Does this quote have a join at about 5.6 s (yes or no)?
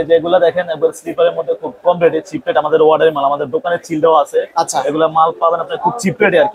no